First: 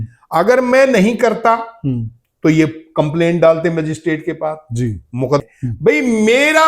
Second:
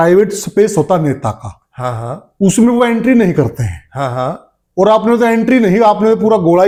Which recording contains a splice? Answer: first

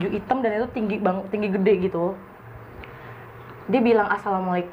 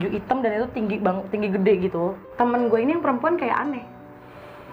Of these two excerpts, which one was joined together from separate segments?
second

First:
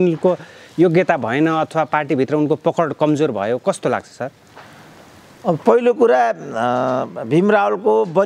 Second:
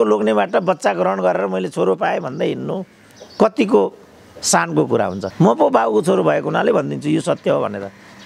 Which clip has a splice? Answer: second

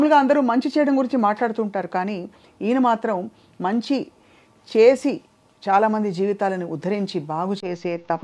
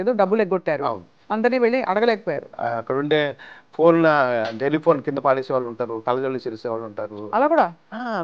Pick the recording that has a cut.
second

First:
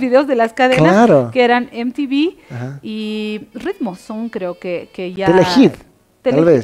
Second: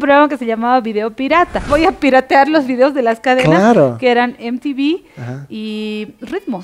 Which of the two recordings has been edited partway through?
second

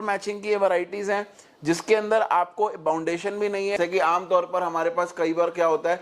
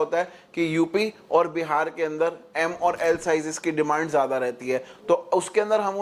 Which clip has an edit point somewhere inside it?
first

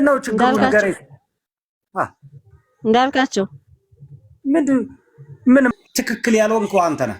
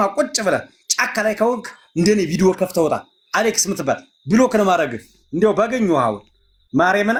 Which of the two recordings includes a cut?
first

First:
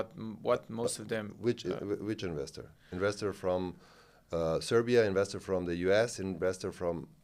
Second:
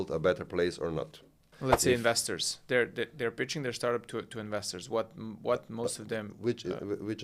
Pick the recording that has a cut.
second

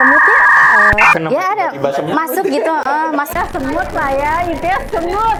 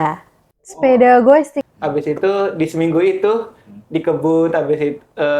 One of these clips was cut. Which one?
second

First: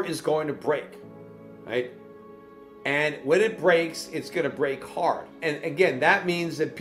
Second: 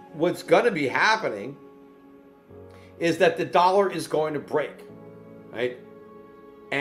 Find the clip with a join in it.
first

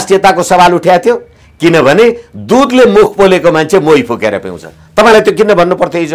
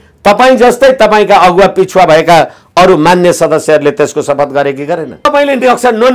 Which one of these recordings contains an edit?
second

